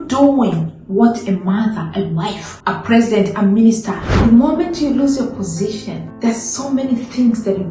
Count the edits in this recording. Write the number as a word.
three